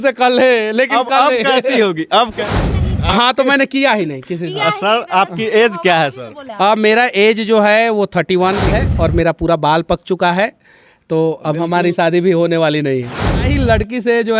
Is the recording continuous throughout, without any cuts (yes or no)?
no